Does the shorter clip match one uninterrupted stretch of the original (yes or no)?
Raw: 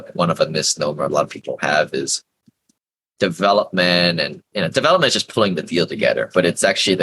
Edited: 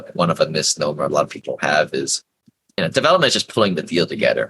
no